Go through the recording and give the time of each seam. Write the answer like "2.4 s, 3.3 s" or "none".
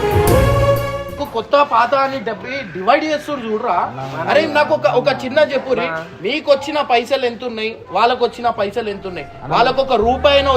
1.1 s